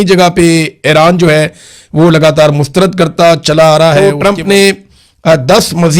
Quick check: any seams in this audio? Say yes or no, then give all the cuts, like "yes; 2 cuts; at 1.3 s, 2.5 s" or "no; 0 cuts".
yes; 1 cut; at 4.0 s